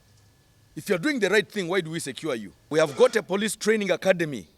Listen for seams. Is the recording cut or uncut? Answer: cut